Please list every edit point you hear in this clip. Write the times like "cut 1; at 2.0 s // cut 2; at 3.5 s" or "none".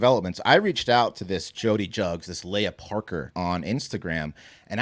cut 1; at 3.3 s